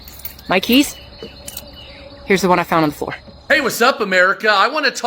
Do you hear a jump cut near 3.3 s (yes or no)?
yes